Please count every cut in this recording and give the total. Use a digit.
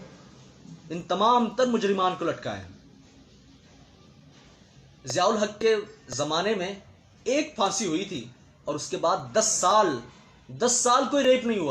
0